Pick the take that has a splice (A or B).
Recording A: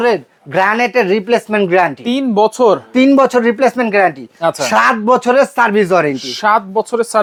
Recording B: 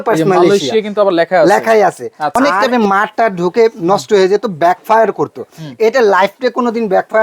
B